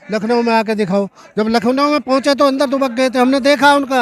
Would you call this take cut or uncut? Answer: uncut